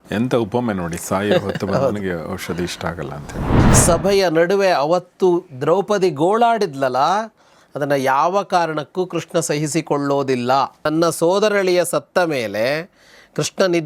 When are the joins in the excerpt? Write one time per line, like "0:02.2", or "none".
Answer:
0:03.5
0:10.9

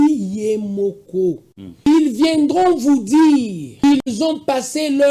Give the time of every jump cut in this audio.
0:01.9
0:03.7

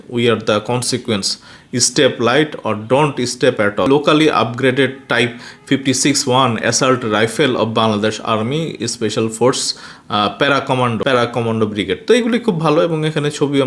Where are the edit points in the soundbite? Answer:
0:03.9
0:11.0

